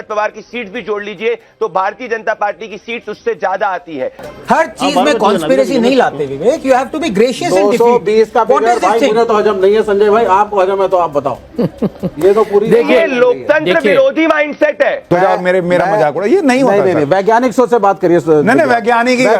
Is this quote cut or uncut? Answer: cut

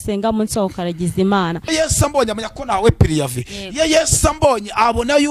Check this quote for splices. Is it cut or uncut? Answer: cut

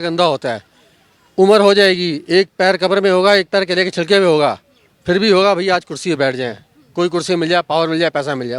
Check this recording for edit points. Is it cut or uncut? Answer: uncut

